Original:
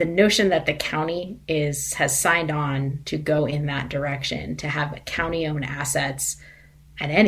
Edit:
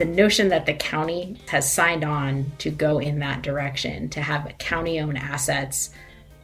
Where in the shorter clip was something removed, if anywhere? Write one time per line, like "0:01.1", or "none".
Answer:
0:01.4